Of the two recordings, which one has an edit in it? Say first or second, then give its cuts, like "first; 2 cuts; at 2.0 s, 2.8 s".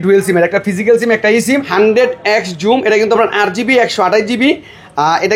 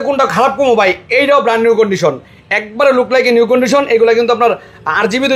first; 1 cut; at 1.7 s